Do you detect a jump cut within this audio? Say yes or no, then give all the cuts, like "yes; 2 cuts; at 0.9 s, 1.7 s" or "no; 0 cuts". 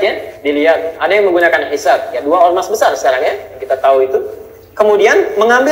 no; 0 cuts